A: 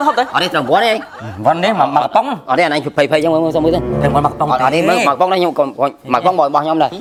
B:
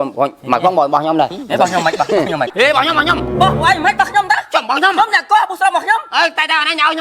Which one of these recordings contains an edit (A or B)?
B